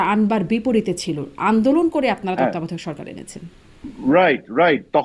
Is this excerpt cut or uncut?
uncut